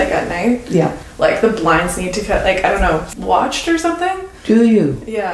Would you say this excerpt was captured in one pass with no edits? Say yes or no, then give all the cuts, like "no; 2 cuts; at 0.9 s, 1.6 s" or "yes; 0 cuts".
no; 2 cuts; at 1.0 s, 3.1 s